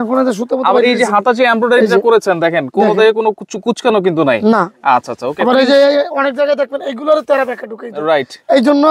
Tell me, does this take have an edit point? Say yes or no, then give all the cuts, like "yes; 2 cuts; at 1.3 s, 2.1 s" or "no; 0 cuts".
no; 0 cuts